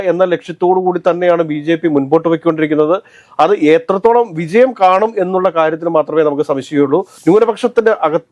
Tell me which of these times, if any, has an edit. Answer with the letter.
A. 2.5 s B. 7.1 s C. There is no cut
B